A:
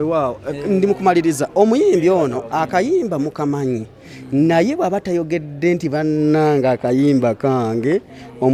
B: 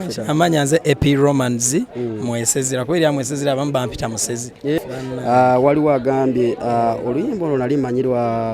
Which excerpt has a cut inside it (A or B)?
B